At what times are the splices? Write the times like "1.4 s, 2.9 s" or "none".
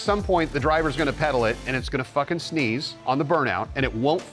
2.9 s